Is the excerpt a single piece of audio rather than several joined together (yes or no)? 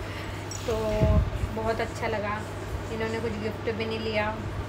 yes